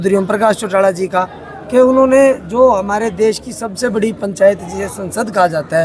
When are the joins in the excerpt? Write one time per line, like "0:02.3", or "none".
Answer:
none

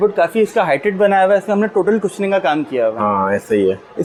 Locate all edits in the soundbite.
none

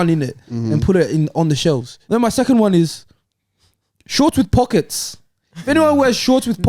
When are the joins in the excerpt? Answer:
0:01.9

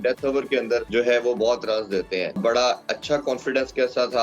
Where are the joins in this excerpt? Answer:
0:00.9
0:02.4

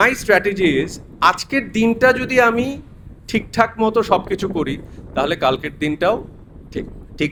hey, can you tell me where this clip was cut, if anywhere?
none

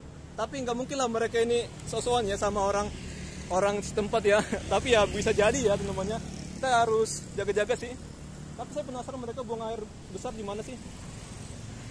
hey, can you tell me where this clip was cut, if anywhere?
none

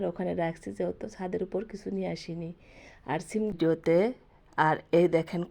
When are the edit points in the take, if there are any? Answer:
0:03.5

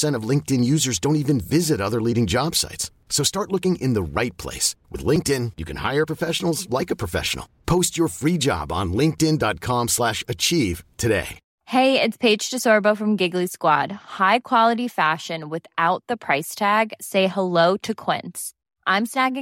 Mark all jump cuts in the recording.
0:11.4

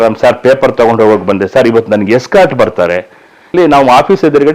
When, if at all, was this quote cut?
0:03.5

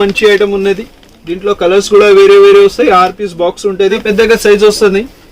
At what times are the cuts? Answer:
0:04.0

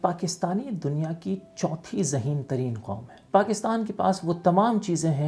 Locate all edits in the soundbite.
0:03.2

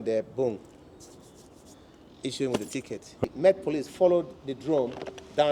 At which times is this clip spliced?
0:03.2

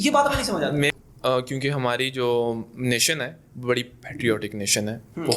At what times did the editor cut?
0:01.0

